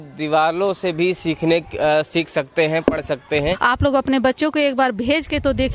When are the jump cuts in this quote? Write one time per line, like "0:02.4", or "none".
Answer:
0:03.6